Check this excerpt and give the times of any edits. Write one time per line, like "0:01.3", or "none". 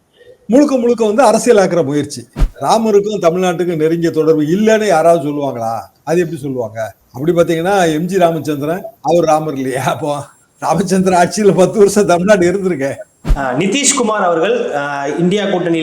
0:02.5
0:13.1